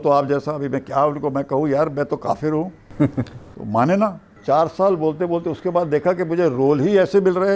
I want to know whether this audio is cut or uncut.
cut